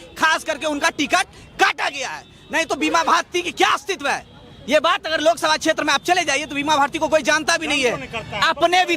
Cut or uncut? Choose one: uncut